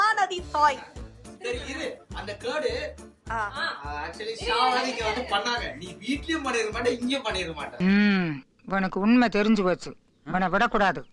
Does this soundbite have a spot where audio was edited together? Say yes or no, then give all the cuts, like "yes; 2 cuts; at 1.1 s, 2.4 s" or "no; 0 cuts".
no; 0 cuts